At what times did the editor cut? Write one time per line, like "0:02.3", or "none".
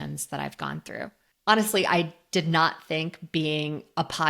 0:01.3

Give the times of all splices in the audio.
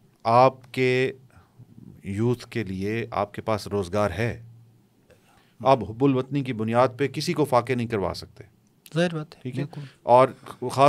0:05.1

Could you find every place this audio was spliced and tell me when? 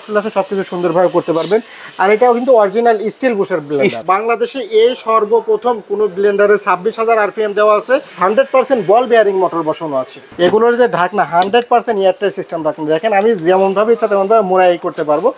0:04.0
0:08.1
0:10.2

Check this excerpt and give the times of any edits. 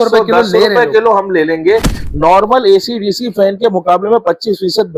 0:02.0

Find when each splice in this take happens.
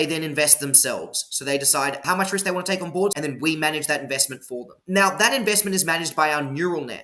0:02.0
0:03.1
0:04.7

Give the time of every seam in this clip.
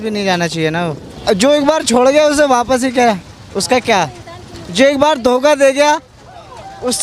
0:01.1

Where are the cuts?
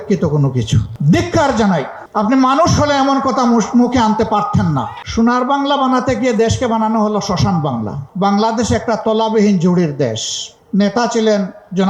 0:00.9
0:05.0
0:08.0
0:10.5

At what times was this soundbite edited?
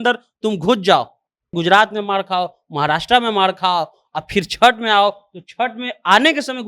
0:01.5

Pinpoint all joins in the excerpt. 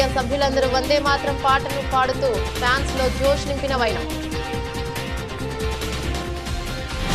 none

